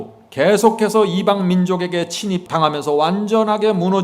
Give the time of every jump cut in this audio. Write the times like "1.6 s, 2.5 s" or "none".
2.4 s